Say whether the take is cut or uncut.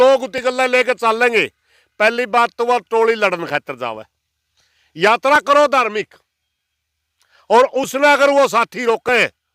uncut